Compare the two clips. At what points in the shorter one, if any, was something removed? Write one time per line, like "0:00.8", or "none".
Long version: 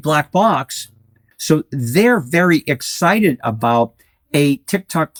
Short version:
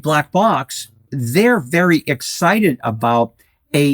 0:01.2